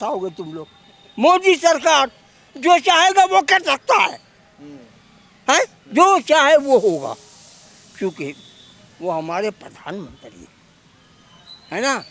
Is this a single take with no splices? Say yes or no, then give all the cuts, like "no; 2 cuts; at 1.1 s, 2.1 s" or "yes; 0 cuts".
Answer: yes; 0 cuts